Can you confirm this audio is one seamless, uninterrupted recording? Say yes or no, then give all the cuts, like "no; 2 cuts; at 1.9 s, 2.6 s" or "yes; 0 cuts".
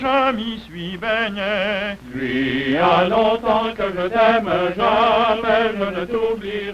yes; 0 cuts